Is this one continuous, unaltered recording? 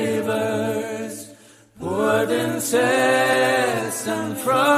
no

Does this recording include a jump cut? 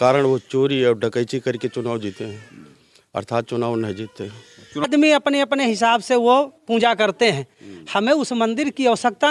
yes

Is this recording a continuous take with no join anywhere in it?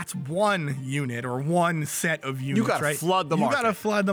yes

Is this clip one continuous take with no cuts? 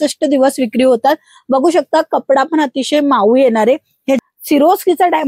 no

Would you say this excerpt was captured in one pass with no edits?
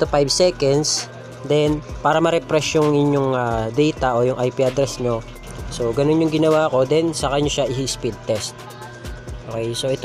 no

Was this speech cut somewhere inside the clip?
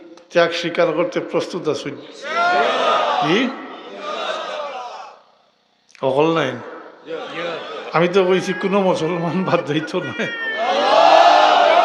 no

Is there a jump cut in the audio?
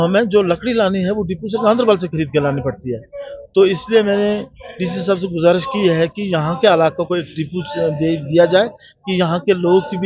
no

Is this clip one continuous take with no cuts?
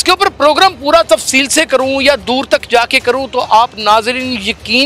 yes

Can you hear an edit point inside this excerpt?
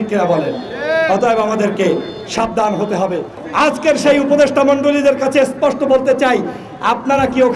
yes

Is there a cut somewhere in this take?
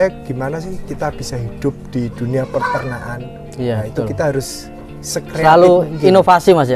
no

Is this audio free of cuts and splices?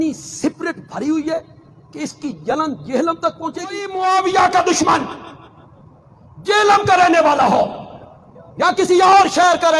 no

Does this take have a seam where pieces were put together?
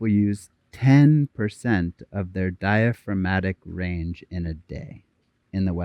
no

